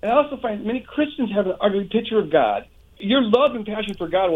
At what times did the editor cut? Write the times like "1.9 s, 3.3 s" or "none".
3.0 s